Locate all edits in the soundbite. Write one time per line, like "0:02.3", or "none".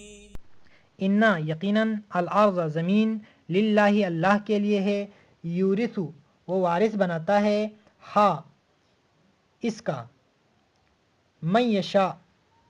0:04.5